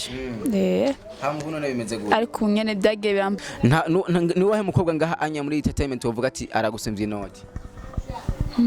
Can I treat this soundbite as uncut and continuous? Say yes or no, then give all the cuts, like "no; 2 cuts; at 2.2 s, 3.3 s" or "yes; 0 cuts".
no; 1 cut; at 3.4 s